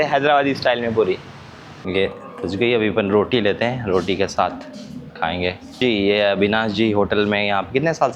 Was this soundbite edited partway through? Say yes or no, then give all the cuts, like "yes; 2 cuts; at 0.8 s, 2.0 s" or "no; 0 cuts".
yes; 2 cuts; at 1.8 s, 5.8 s